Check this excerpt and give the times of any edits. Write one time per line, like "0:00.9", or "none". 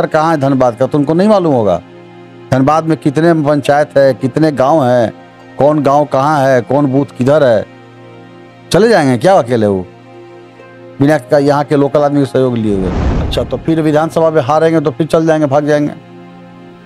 0:13.1